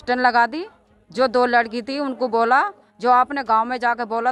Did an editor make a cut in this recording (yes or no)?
no